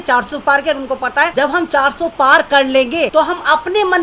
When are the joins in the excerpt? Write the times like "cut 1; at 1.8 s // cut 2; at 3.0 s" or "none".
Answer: cut 1; at 1.3 s // cut 2; at 3.1 s